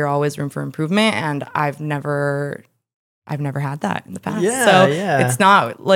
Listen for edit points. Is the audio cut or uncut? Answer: uncut